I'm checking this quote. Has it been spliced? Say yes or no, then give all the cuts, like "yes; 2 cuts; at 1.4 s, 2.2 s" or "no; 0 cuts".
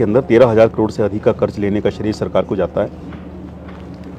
no; 0 cuts